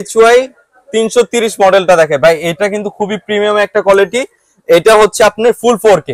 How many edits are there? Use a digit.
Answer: 0